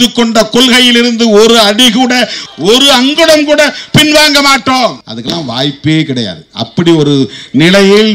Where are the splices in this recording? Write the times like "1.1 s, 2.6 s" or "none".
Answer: 5.0 s